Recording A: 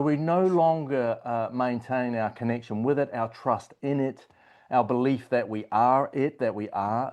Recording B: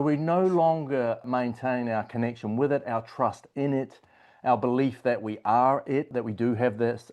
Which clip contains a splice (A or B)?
B